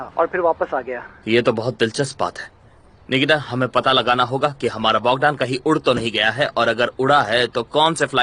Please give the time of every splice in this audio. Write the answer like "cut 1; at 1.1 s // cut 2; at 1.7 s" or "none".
none